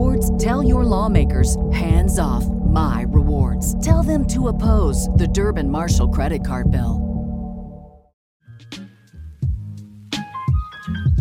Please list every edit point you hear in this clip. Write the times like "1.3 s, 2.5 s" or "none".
8.3 s